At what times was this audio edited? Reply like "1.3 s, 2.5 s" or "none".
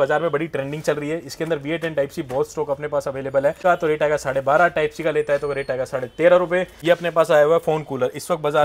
3.6 s, 6.7 s